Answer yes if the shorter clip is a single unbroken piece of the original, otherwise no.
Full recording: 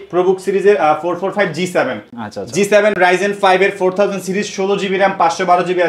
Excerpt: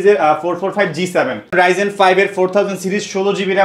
no